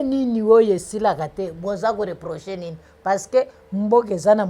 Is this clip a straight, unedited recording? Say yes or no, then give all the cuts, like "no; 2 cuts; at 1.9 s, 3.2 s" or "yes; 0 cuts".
yes; 0 cuts